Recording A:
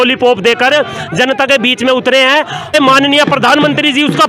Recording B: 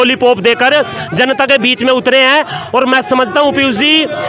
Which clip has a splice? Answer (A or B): A